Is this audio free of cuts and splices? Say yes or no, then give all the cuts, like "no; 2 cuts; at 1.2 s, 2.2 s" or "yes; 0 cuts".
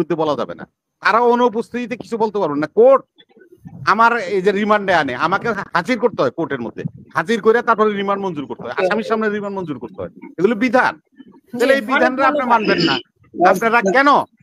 yes; 0 cuts